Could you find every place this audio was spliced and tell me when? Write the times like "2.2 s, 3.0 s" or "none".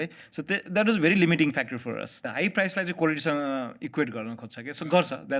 2.2 s